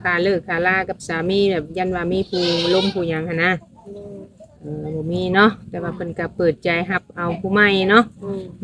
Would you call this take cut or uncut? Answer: uncut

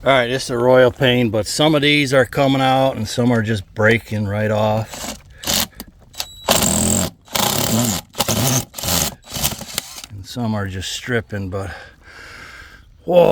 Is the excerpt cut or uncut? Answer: uncut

